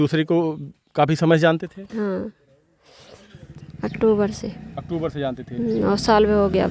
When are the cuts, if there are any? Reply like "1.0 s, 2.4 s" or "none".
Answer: none

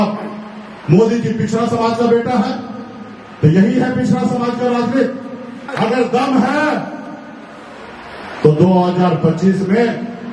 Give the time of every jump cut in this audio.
5.7 s

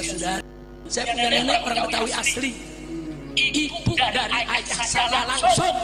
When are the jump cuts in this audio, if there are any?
none

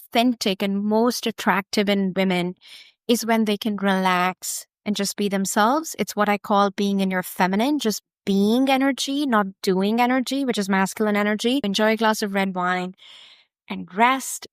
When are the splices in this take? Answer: 11.6 s

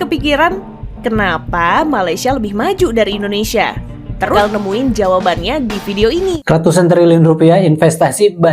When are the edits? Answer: 4.3 s, 6.4 s

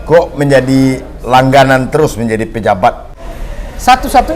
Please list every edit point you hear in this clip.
3.1 s

